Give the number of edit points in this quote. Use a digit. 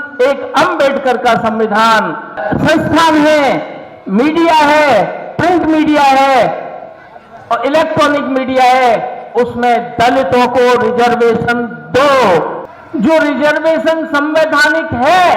2